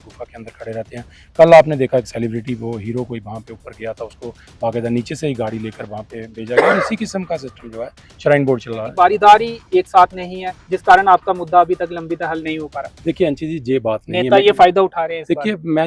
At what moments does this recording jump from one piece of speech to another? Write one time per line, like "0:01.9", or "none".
0:08.9